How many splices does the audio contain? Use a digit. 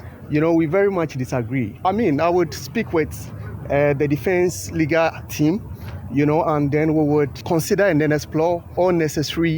3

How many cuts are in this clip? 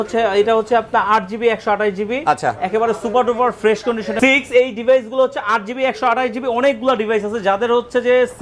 1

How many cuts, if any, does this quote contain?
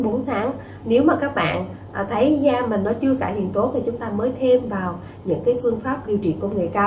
0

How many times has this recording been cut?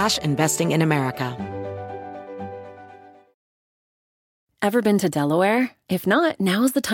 1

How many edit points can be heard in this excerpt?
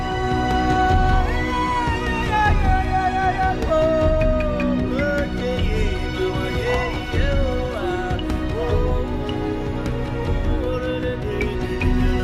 1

